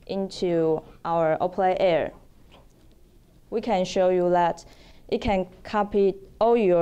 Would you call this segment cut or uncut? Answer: cut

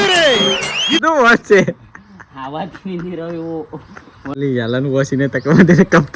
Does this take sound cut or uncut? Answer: cut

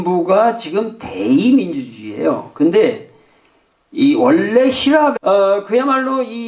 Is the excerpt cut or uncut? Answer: uncut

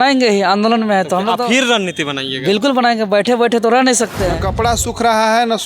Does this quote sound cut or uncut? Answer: cut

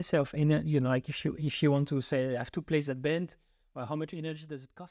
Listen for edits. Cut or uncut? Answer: uncut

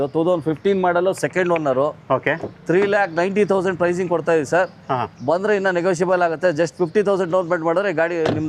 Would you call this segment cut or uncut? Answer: uncut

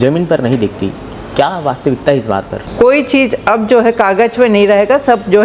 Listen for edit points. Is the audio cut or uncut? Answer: cut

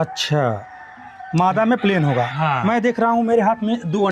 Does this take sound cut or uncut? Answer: uncut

